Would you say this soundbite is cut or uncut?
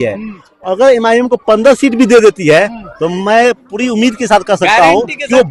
uncut